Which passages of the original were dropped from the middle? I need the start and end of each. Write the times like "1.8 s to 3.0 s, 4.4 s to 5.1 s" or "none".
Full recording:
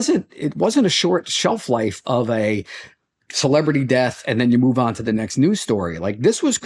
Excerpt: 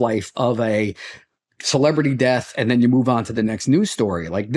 none